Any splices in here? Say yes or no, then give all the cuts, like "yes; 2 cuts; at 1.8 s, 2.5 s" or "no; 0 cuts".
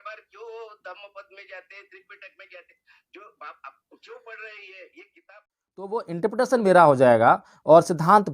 yes; 1 cut; at 6.0 s